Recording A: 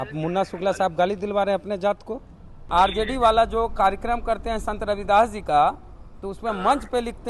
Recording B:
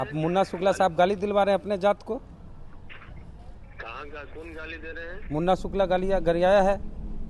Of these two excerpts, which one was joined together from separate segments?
A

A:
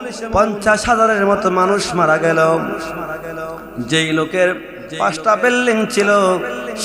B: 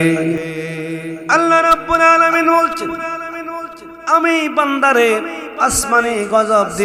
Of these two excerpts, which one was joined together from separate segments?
B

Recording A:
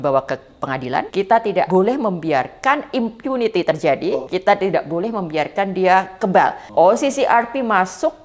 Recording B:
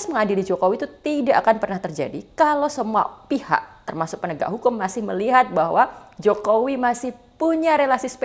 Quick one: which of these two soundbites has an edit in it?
A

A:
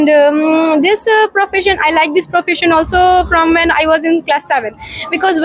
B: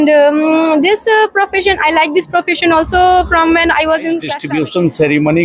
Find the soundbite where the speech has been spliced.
B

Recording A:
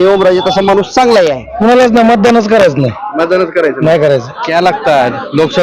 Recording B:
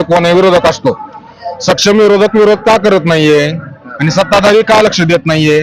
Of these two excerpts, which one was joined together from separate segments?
A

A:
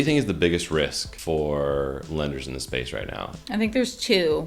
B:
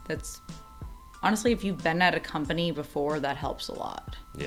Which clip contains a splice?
A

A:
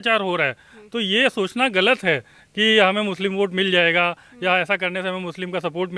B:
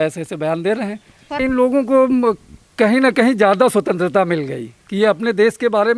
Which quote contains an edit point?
B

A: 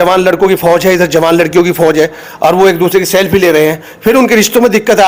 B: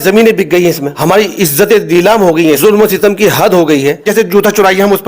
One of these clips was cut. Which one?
B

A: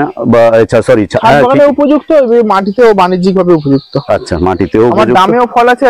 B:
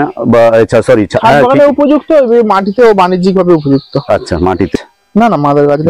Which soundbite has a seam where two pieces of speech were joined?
B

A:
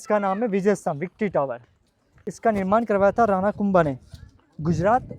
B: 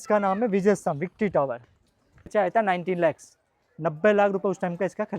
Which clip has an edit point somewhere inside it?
B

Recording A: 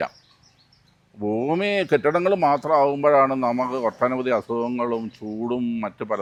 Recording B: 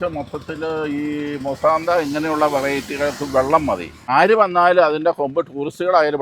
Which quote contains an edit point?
B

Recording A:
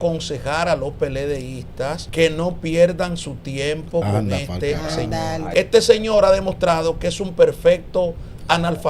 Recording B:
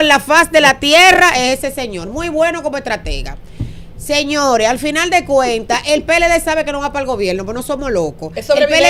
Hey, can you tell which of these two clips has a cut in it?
A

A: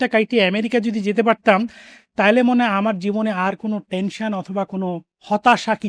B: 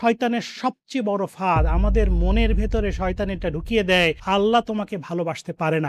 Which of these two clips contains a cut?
B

